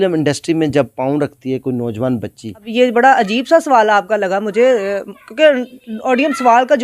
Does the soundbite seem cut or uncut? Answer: cut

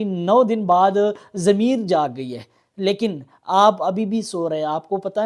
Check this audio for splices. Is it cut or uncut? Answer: uncut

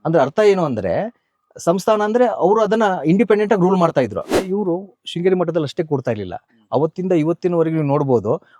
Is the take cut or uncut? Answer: cut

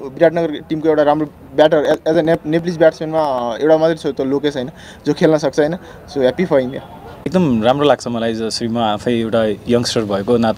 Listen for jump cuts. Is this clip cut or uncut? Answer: cut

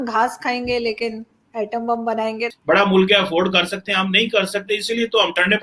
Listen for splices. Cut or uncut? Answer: cut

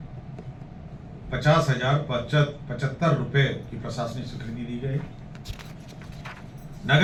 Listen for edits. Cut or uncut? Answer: uncut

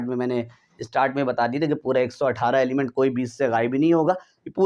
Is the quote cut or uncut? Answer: uncut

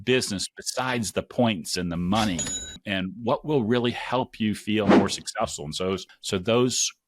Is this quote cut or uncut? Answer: cut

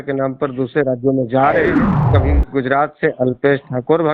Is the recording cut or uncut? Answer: cut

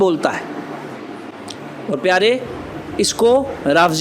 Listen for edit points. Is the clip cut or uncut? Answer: cut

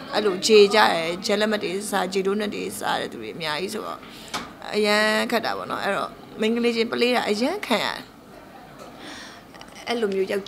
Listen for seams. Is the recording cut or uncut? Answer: uncut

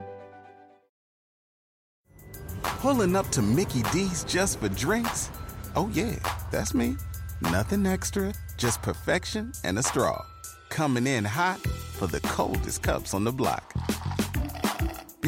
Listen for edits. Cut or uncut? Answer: uncut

